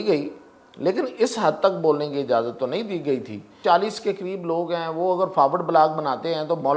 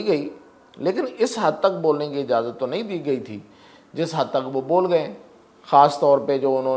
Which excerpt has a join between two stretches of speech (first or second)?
first